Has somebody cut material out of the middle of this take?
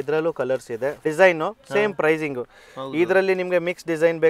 yes; 1 cut; at 1.0 s

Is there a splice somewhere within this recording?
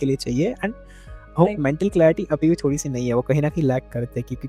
no; 0 cuts

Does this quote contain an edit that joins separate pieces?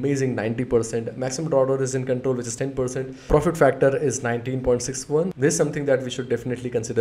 yes; 2 cuts; at 3.3 s, 5.3 s

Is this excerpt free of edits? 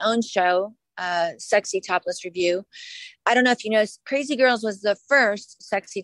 yes; 0 cuts

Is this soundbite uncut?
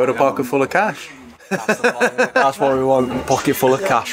yes; 0 cuts

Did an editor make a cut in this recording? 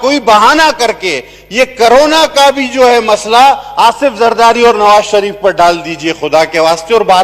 no; 0 cuts

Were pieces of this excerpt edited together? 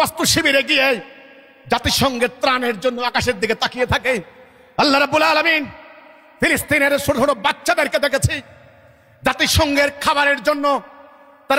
no; 0 cuts

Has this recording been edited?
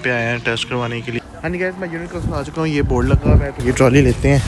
yes; 2 cuts; at 1.2 s, 3.5 s

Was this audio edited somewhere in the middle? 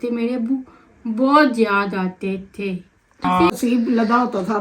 yes; 1 cut; at 3.5 s

